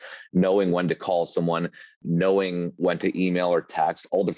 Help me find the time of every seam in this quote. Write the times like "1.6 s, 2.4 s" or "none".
2.0 s, 2.8 s